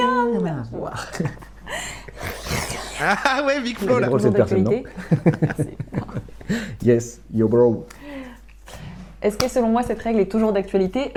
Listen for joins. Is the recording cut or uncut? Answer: uncut